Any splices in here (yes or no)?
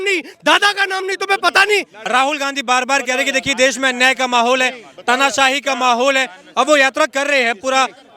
yes